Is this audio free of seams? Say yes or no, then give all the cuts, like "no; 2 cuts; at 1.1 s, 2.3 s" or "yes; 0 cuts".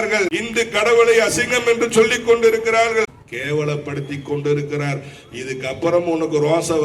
no; 1 cut; at 3.1 s